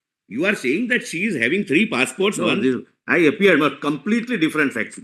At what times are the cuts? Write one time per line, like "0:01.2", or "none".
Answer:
0:02.4